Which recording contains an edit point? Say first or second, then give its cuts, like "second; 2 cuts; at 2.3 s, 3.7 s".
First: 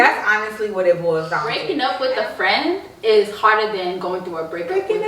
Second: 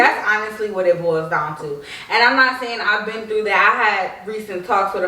first; 1 cut; at 1.6 s